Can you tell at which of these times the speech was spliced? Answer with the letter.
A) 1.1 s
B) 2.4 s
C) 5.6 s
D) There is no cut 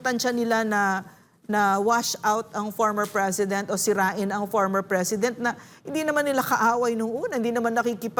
D